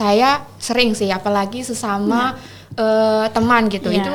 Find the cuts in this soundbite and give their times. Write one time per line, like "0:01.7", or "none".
none